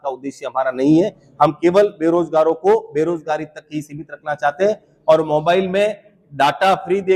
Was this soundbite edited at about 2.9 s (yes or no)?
no